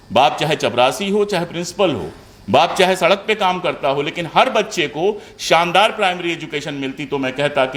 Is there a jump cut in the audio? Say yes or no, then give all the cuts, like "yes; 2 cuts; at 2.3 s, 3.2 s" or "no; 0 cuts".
no; 0 cuts